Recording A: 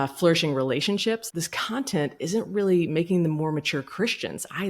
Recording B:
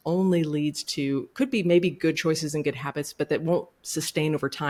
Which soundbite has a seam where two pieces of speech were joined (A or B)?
A